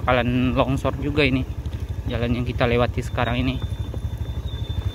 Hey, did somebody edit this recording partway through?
no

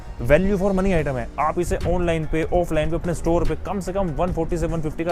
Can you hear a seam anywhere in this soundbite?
no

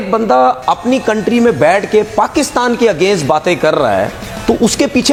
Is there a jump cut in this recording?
no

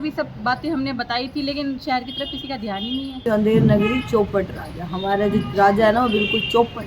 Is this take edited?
yes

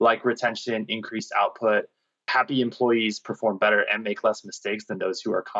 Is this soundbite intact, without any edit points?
no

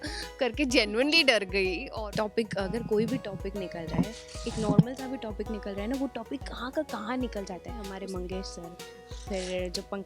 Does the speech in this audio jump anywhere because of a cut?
yes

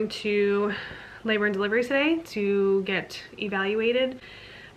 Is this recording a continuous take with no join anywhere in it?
yes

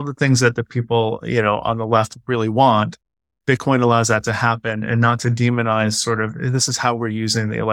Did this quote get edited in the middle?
no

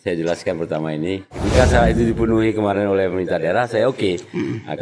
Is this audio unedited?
no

